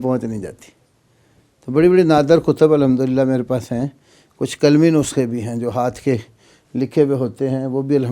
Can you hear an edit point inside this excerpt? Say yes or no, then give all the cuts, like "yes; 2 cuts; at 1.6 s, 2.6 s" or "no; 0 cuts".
no; 0 cuts